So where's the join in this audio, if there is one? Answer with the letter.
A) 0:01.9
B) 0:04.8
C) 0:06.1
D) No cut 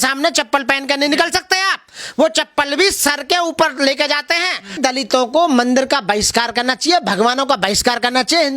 B